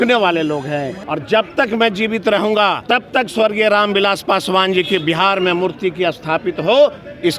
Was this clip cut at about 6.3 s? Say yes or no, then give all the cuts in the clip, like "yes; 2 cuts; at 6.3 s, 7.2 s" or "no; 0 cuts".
no; 2 cuts; at 1.0 s, 2.8 s